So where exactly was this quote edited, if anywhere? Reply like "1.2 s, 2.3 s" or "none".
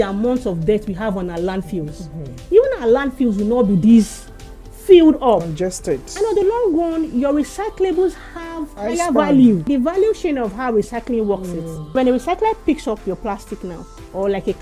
8.7 s, 9.7 s, 11.9 s